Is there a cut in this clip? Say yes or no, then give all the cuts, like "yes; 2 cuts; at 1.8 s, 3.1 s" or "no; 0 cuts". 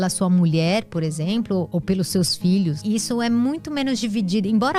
yes; 2 cuts; at 1.7 s, 2.8 s